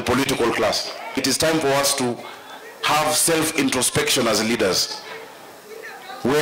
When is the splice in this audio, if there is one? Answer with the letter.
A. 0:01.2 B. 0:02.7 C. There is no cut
A